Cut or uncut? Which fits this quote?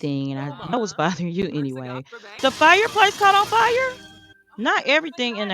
cut